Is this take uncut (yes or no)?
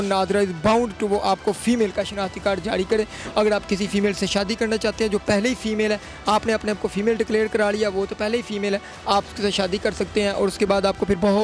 yes